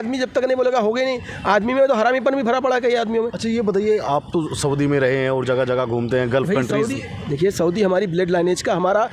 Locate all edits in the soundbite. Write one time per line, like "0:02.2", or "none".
none

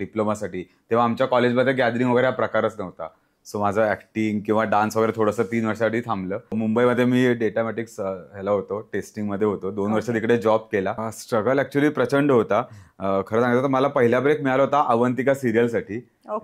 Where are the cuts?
0:06.6
0:11.1

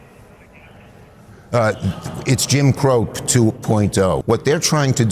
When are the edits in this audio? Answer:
0:04.2

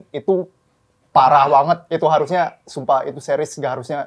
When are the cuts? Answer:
none

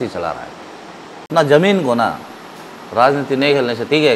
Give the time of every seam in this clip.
0:01.3

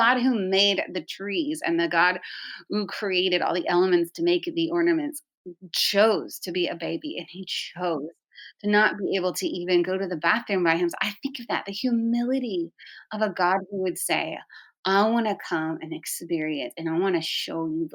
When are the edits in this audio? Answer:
none

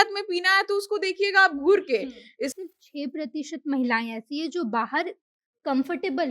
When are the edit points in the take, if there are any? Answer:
0:02.6

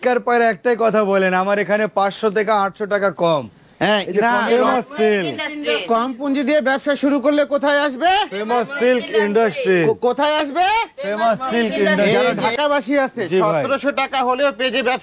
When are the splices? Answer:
0:04.5
0:12.4

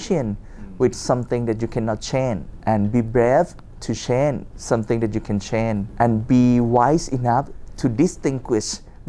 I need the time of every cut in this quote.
0:02.5
0:04.5
0:05.9

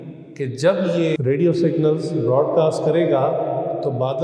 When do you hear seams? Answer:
0:01.2

